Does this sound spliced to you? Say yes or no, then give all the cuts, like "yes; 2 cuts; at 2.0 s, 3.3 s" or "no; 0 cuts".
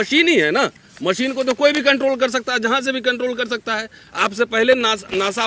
no; 0 cuts